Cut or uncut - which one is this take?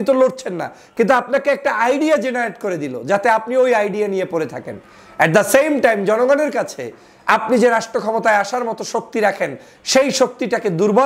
uncut